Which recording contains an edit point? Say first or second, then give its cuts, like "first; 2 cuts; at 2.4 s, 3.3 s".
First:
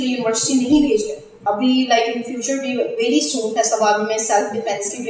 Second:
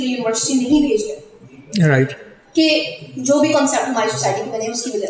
first; 1 cut; at 1.4 s